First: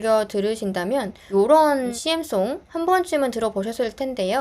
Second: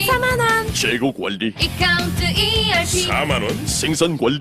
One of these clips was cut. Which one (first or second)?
first